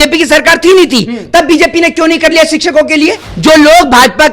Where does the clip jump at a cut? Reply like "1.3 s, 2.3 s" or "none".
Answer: 3.3 s